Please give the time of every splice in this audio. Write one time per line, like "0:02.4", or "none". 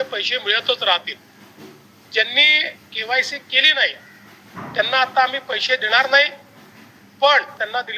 none